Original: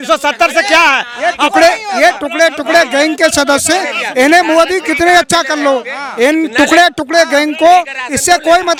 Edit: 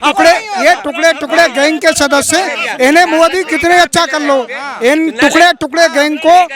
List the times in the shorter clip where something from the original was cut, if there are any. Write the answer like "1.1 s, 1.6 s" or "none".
none